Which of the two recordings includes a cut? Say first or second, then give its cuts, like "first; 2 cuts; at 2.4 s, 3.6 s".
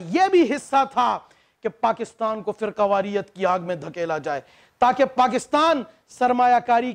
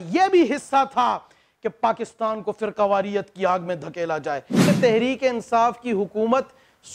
second; 1 cut; at 4.7 s